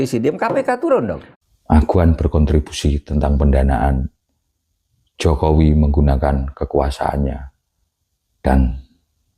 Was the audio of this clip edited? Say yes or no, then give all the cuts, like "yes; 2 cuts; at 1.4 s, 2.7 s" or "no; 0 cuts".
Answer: yes; 1 cut; at 1.3 s